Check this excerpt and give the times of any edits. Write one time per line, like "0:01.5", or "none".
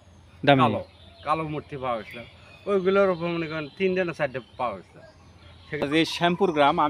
0:05.8